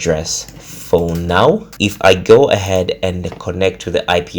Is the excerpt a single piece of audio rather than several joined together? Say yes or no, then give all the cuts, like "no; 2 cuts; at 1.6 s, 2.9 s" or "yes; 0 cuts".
no; 1 cut; at 1.7 s